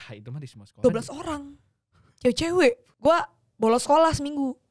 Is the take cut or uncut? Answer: cut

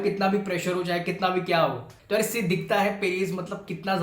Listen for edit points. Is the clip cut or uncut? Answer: cut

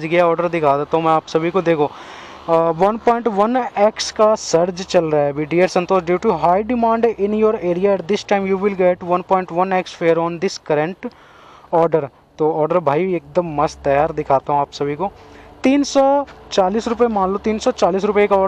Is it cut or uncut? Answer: uncut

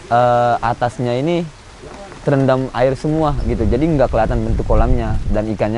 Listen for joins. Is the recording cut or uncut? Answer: uncut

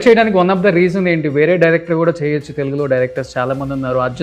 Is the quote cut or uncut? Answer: uncut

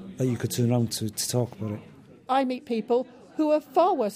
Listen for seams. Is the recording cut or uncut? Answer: cut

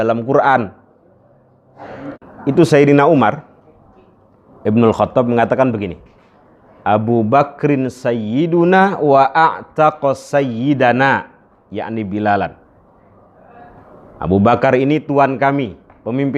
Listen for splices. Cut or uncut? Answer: cut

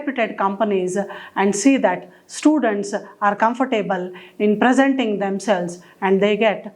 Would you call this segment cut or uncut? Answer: uncut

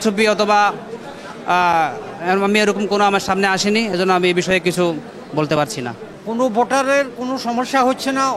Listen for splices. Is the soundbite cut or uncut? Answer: uncut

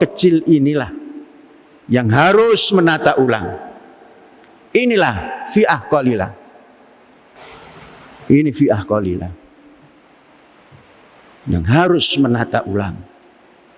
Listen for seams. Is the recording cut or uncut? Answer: cut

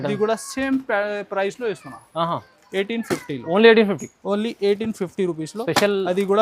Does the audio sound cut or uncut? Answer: uncut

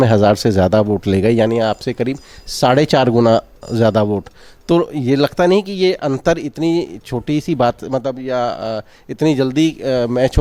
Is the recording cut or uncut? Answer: uncut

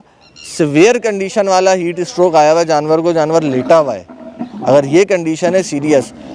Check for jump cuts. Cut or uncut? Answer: uncut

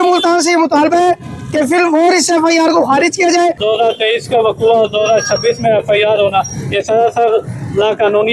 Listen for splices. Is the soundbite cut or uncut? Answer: cut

